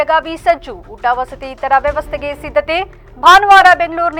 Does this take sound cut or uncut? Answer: uncut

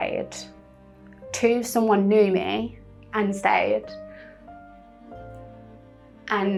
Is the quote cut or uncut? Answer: uncut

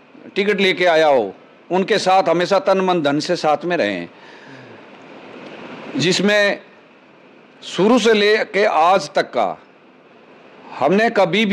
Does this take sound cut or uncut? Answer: uncut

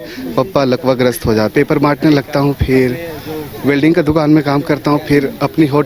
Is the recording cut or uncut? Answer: cut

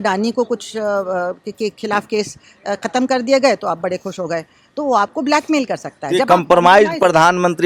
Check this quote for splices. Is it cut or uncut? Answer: uncut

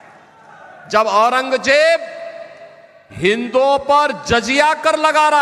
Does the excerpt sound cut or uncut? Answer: uncut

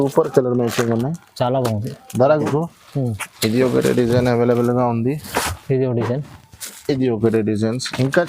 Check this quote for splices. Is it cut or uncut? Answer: cut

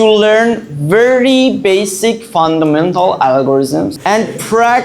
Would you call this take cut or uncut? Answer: cut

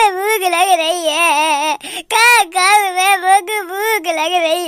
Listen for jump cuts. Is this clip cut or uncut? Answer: uncut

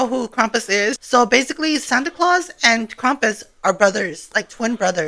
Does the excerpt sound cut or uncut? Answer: cut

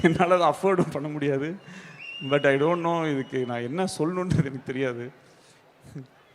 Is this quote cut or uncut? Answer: uncut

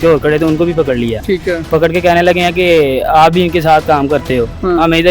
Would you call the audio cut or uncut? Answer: cut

